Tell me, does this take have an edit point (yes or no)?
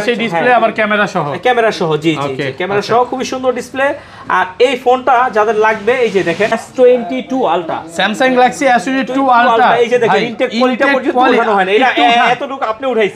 yes